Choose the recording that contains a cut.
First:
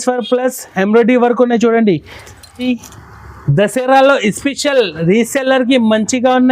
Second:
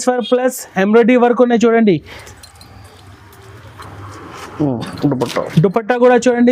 first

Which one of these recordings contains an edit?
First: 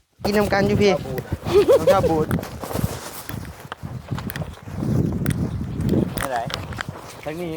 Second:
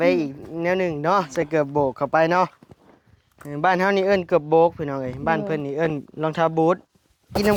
first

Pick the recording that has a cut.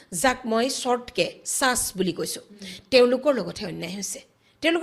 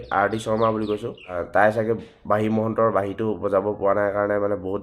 second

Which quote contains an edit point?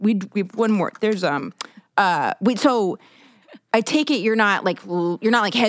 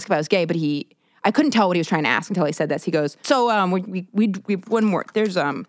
second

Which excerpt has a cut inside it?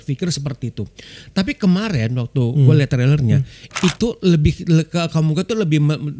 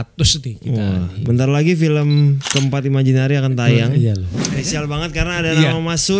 second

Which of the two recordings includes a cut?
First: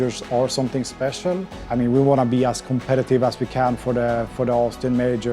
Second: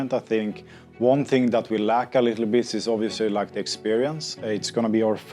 first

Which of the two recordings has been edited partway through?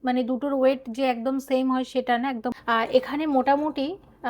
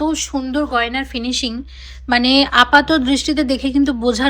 first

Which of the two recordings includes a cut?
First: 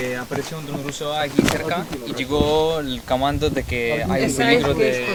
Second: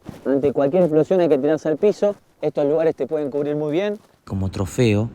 second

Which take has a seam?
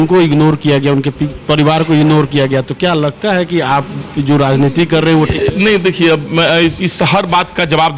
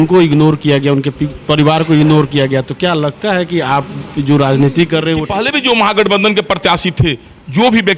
second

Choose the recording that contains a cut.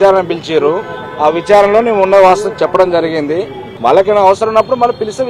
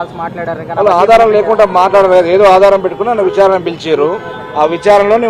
first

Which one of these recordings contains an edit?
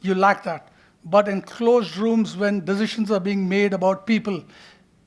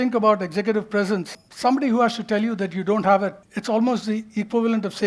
second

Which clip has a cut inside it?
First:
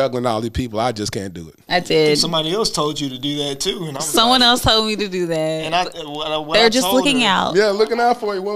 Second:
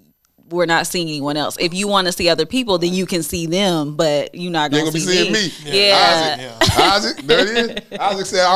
first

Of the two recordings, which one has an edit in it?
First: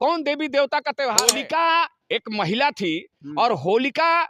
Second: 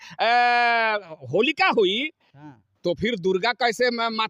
first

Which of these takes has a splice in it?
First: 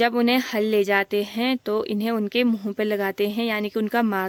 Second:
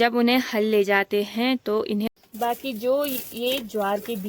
second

